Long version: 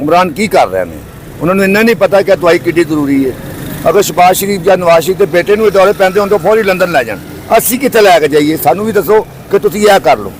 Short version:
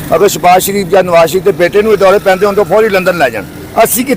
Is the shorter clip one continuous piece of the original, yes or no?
yes